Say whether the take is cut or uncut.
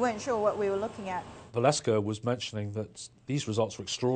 cut